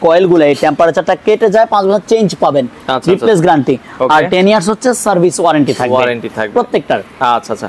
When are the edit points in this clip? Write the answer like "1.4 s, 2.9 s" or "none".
none